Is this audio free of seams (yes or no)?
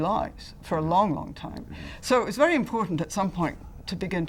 yes